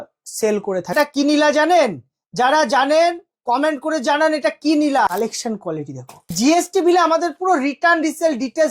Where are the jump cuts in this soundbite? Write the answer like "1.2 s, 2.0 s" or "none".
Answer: 0.9 s, 5.7 s